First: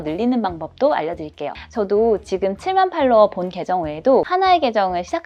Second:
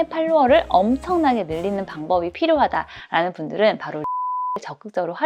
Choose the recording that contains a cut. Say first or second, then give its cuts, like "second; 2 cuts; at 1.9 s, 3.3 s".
first; 2 cuts; at 1.5 s, 4.3 s